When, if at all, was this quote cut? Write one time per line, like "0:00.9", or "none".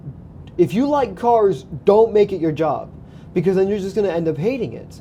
none